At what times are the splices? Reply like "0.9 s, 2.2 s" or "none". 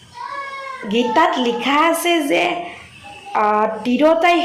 none